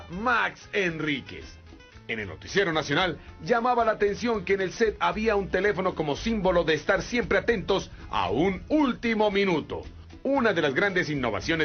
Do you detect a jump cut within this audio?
yes; 1 cut; at 7.1 s

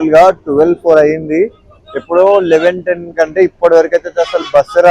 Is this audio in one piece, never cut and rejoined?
yes; 0 cuts

